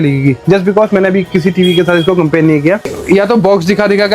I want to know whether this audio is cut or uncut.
cut